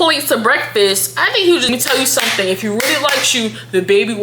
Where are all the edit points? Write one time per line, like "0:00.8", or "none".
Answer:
0:01.7